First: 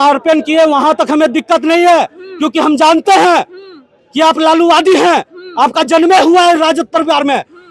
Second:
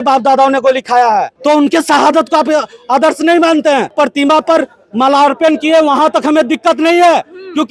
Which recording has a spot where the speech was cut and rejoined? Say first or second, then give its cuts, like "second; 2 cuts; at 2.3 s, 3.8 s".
second; 2 cuts; at 1.3 s, 3.9 s